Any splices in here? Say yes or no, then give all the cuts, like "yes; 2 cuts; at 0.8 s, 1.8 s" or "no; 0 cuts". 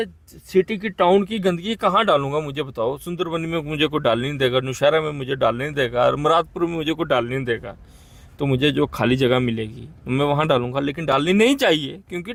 no; 0 cuts